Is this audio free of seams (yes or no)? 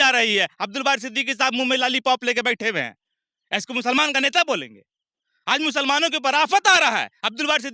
yes